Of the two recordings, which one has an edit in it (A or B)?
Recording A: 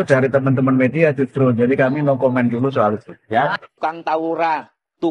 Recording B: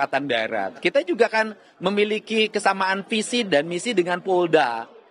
A